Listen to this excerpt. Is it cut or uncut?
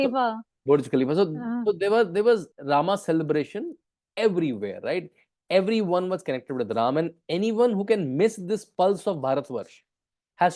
cut